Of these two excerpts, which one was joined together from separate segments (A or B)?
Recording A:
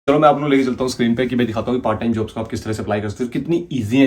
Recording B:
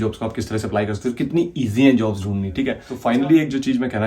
B